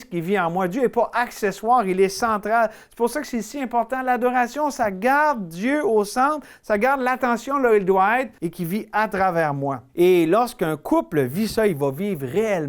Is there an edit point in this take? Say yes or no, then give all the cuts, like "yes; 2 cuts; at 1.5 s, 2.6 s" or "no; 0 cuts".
yes; 2 cuts; at 8.4 s, 9.8 s